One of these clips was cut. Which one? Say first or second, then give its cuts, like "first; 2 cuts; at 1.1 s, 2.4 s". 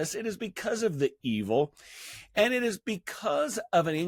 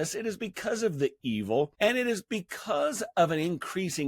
second; 1 cut; at 1.7 s